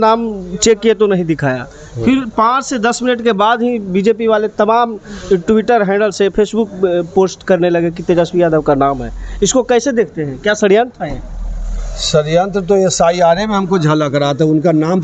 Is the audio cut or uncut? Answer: uncut